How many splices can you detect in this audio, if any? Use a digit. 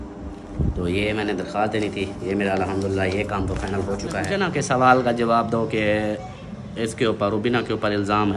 1